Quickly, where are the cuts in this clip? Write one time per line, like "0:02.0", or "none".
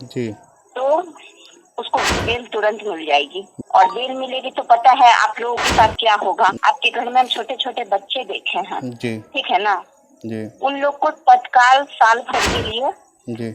0:06.6